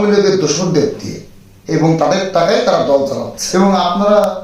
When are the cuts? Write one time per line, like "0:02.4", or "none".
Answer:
0:03.3